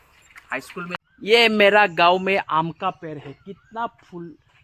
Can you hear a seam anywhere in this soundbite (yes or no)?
yes